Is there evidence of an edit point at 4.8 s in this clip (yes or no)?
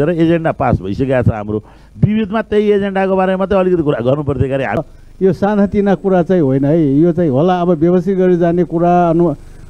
yes